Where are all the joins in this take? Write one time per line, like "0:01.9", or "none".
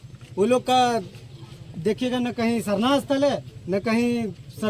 none